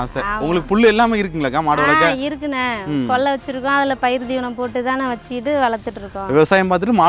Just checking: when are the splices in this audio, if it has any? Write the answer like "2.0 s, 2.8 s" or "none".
none